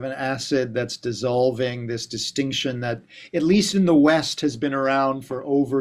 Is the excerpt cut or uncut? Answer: uncut